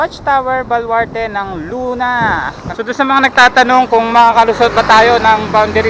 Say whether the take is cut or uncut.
cut